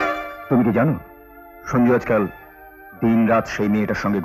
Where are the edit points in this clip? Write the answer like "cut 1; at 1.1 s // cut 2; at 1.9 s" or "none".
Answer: none